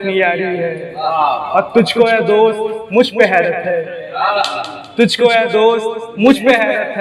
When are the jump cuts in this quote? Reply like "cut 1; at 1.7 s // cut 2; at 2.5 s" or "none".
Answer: none

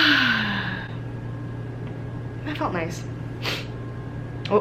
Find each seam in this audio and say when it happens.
none

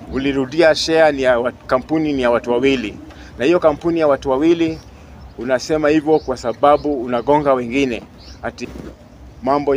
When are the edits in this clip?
cut 1; at 8.6 s

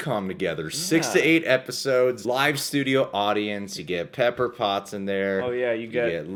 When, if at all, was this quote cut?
none

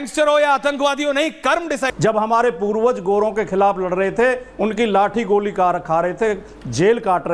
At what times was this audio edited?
cut 1; at 1.9 s

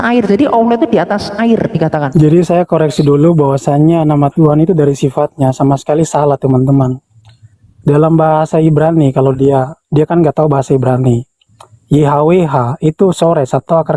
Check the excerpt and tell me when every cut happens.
cut 1; at 2.1 s

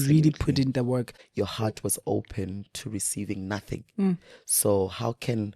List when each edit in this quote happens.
cut 1; at 1.2 s

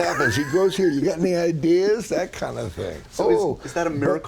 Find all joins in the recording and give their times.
none

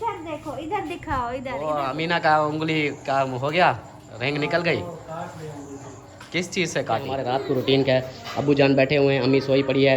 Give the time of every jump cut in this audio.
cut 1; at 1.6 s // cut 2; at 7.1 s

